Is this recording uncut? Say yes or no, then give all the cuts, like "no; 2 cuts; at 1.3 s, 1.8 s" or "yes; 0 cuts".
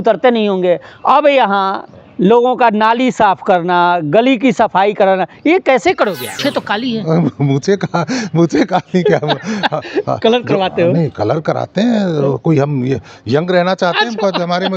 no; 1 cut; at 6.4 s